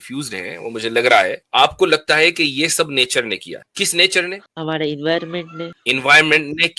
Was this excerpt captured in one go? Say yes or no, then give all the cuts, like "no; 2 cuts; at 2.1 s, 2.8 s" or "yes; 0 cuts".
no; 4 cuts; at 1.4 s, 3.6 s, 4.5 s, 5.7 s